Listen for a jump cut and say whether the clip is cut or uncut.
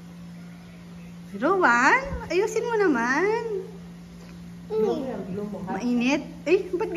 uncut